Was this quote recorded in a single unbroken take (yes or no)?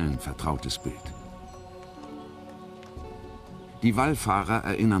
yes